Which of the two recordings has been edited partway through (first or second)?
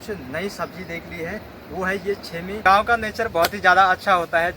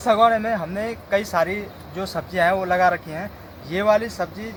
first